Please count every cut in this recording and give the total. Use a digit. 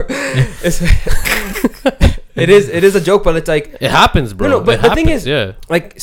0